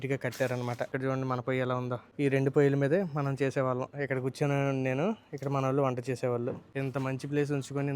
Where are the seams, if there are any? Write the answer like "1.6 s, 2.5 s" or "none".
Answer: 0.9 s, 2.1 s, 6.7 s